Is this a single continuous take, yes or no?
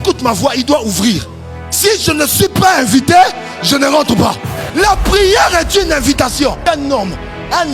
no